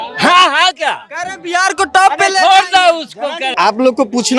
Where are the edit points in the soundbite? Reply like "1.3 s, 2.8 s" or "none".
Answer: none